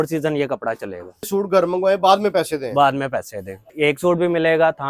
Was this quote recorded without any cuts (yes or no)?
no